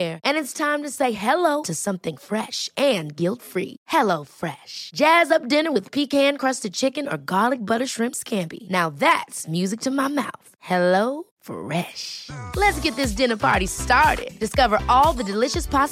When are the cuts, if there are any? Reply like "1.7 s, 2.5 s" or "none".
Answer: none